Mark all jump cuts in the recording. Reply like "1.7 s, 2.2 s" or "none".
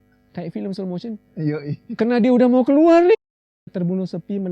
3.1 s